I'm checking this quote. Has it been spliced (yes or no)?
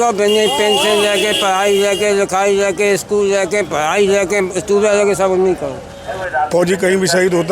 yes